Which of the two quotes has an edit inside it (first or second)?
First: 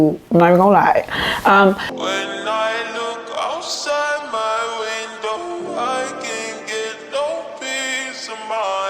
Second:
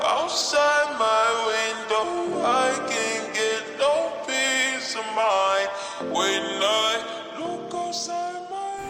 first